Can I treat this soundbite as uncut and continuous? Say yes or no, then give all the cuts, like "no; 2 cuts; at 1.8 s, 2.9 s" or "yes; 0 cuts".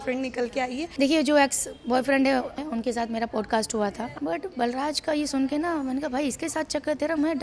no; 3 cuts; at 0.9 s, 2.6 s, 4.1 s